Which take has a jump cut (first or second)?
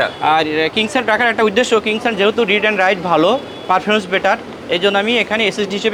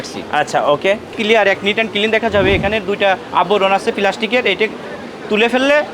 second